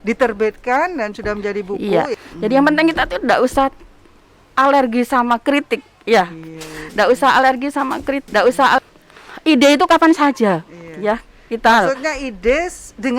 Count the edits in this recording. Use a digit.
2